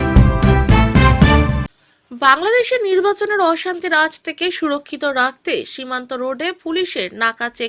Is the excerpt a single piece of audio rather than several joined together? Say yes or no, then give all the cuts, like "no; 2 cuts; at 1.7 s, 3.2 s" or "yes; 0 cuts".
yes; 0 cuts